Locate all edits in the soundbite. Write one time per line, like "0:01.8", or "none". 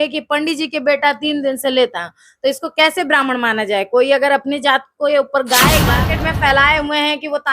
0:05.9